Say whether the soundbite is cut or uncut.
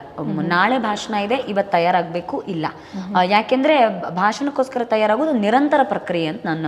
uncut